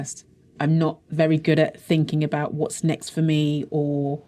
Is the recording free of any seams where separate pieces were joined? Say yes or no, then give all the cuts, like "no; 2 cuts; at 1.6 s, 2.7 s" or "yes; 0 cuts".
yes; 0 cuts